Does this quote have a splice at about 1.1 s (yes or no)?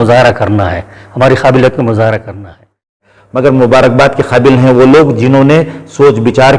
no